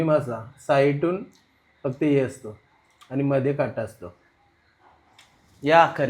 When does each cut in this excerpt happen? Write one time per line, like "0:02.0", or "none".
none